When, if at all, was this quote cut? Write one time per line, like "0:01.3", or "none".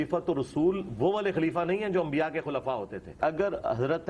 0:03.2